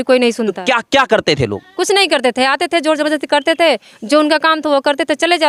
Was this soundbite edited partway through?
no; 0 cuts

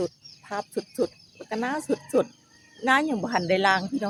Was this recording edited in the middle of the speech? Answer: no; 0 cuts

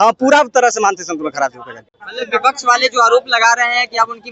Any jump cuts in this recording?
no; 0 cuts

